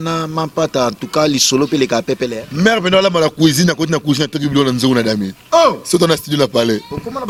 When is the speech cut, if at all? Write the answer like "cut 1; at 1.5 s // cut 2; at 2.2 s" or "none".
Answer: none